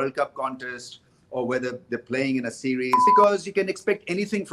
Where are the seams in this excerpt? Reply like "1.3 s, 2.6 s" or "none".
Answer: 3.0 s